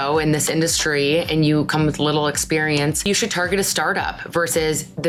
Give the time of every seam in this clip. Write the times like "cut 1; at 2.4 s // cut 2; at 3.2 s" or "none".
none